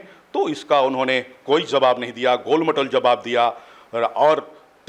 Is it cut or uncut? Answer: uncut